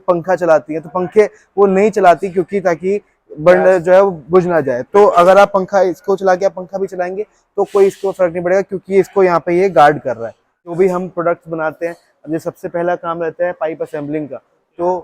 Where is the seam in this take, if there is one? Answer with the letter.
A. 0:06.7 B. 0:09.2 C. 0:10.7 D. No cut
C